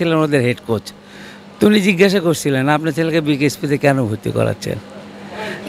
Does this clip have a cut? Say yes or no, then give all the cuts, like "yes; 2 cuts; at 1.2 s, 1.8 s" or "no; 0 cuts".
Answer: no; 0 cuts